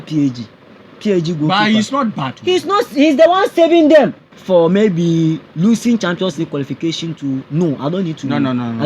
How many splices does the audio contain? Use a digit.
1